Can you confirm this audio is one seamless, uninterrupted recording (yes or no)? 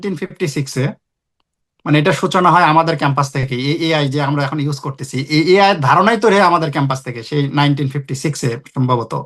yes